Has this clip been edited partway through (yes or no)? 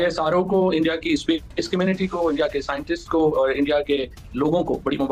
no